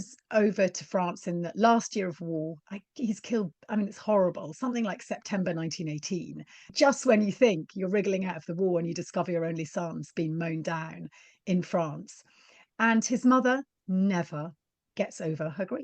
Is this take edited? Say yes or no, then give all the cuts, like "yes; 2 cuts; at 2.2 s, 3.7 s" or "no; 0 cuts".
yes; 1 cut; at 6.6 s